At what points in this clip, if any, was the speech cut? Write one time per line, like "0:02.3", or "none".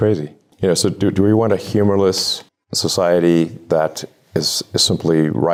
none